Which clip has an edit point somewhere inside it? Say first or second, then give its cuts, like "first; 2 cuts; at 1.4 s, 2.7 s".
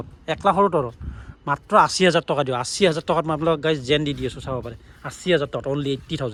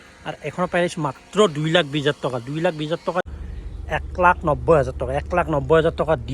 second; 1 cut; at 3.3 s